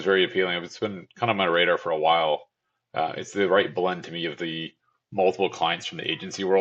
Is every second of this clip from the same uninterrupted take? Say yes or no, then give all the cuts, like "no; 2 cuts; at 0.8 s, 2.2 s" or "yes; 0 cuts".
yes; 0 cuts